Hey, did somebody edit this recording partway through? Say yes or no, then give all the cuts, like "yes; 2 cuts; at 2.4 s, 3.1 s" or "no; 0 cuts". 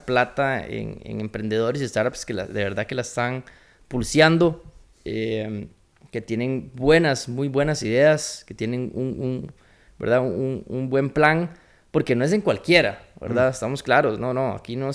no; 0 cuts